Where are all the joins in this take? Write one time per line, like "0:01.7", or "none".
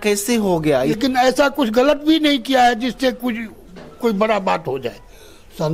0:01.0